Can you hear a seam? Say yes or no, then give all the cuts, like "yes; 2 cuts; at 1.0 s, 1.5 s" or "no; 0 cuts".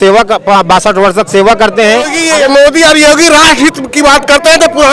yes; 1 cut; at 2.2 s